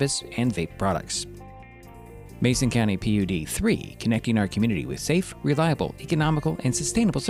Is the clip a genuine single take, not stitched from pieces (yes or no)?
yes